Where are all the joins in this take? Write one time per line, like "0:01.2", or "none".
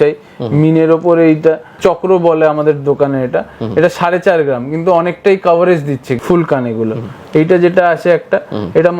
0:01.8
0:06.2